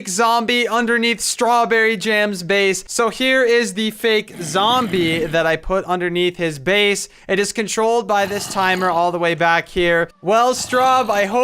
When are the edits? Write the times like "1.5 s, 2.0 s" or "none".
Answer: 2.9 s, 10.1 s